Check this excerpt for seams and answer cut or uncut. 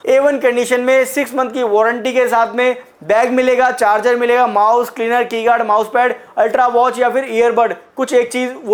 uncut